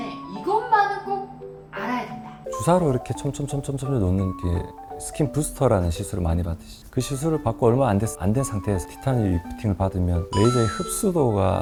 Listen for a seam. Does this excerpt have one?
no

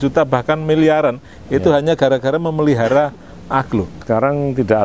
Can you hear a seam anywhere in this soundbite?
yes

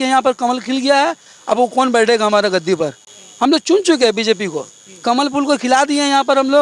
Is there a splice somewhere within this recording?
no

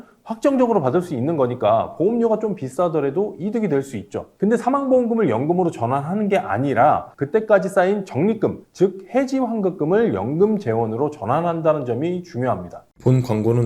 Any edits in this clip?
yes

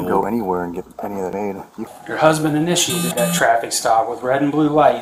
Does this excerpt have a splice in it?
yes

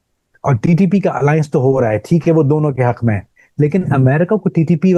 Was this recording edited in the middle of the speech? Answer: no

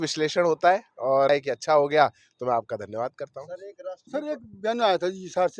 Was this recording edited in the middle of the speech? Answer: yes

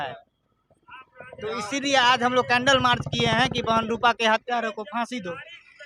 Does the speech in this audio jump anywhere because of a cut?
no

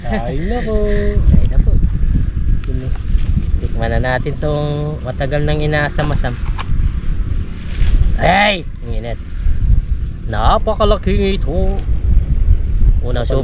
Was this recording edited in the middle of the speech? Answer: no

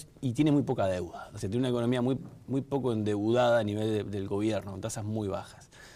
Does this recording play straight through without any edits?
no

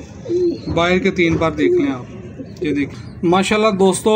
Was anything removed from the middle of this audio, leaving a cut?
yes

